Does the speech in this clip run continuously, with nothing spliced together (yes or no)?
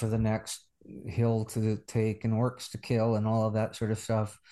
yes